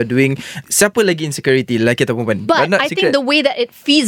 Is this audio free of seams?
no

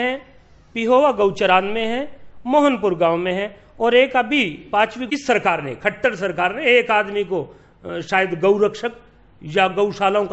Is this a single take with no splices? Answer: no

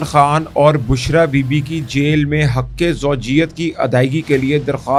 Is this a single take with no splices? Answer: yes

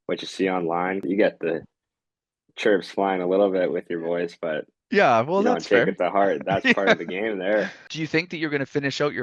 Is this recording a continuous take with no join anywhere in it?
no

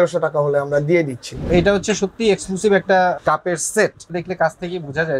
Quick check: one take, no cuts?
no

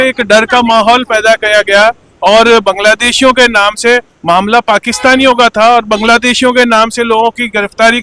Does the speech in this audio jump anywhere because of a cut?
no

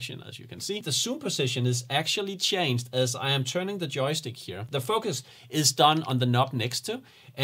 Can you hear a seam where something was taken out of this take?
yes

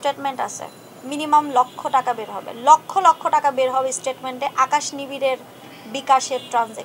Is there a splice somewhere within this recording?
no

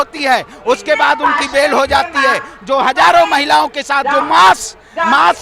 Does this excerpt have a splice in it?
no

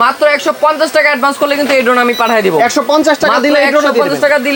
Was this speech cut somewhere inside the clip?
no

